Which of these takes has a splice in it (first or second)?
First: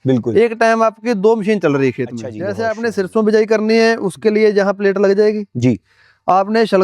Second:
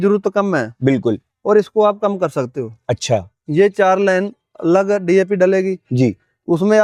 first